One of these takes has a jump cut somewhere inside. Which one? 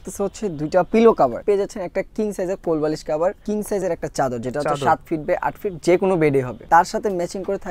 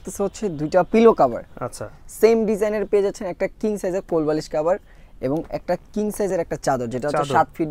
first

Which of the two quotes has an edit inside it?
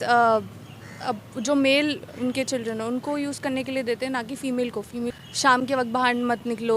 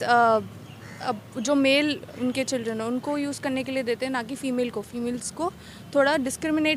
first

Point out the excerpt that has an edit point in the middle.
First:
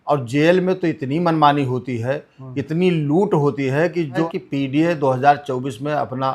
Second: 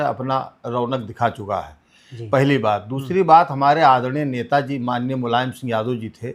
first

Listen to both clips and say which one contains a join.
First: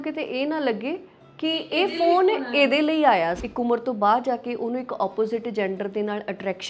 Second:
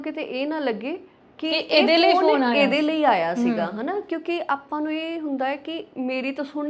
first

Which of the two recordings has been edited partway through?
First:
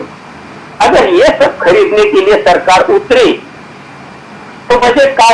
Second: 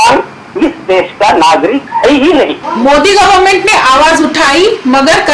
second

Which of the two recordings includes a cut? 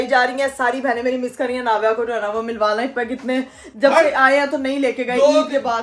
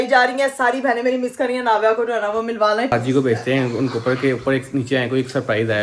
second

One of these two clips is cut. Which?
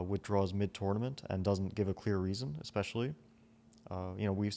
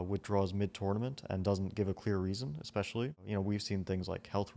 second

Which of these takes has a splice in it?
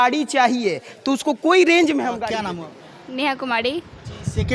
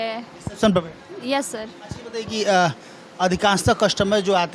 first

